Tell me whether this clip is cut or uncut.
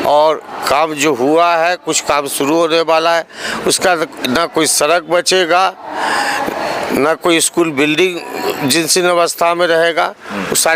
uncut